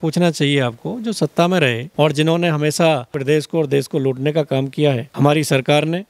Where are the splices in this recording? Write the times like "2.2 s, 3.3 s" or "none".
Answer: 1.8 s, 3.1 s, 5.1 s

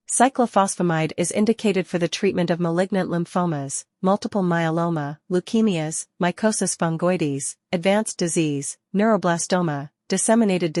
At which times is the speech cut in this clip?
none

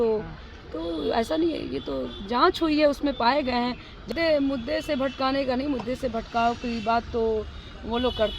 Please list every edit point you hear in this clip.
4.1 s

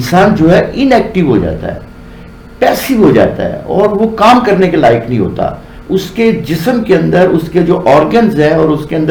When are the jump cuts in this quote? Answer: none

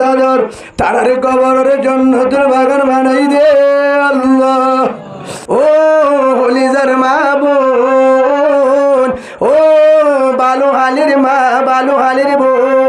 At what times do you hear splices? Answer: 5.4 s

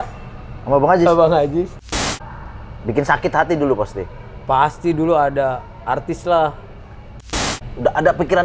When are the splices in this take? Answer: 2.0 s, 7.4 s

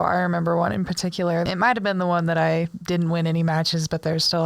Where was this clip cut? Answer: 1.5 s

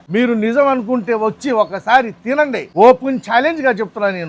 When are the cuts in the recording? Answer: 2.6 s

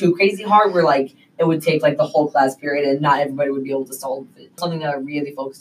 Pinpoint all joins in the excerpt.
4.6 s

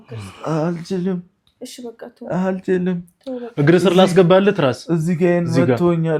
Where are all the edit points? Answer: none

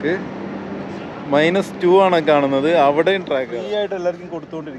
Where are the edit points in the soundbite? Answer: 3.5 s

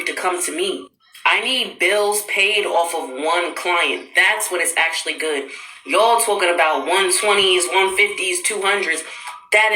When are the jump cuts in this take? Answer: 1.6 s, 6.3 s

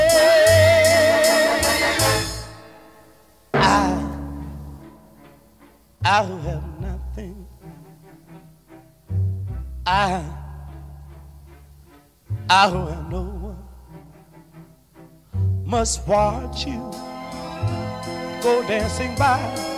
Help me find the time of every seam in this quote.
none

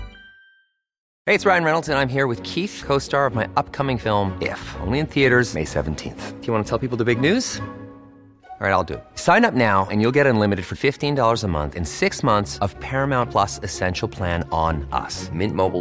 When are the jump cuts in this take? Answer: 1.0 s

